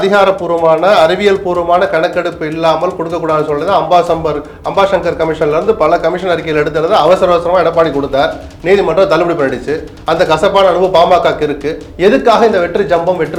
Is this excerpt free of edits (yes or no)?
yes